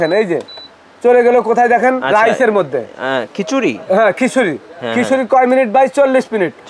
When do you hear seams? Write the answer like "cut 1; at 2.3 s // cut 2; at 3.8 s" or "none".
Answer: none